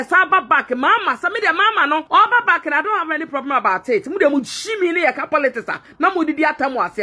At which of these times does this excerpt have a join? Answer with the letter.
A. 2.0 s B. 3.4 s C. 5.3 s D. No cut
A